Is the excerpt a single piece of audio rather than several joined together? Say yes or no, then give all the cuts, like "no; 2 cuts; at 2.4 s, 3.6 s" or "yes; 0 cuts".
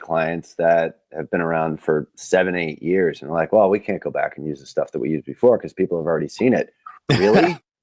yes; 0 cuts